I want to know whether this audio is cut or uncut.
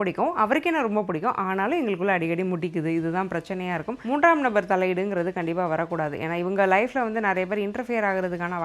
cut